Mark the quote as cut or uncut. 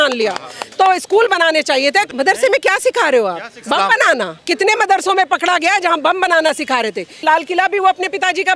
cut